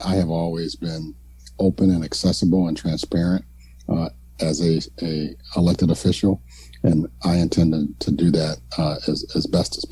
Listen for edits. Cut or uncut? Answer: uncut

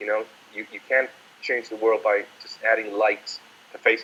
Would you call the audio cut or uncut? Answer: uncut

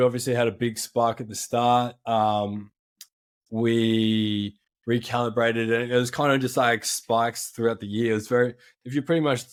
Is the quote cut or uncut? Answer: uncut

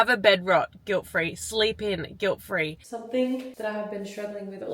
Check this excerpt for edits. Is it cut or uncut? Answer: cut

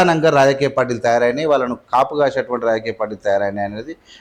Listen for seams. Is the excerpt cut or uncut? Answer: uncut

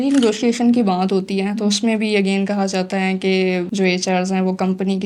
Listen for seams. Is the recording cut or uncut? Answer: uncut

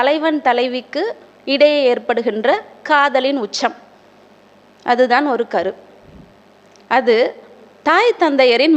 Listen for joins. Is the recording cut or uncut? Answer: uncut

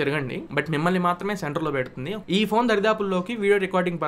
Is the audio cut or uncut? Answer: cut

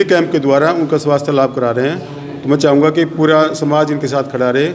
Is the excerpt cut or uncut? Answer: uncut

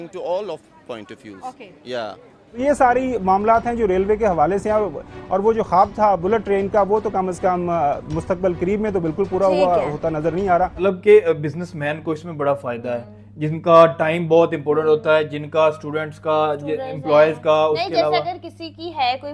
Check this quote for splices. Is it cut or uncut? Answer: cut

